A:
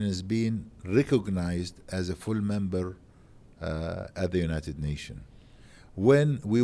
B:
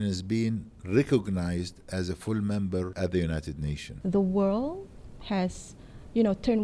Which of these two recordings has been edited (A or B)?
B